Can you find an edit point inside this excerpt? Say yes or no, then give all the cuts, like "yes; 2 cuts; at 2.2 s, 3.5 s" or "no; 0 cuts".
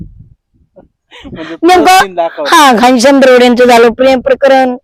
no; 0 cuts